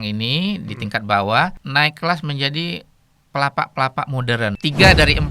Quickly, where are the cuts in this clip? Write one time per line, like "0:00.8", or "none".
0:01.6
0:04.6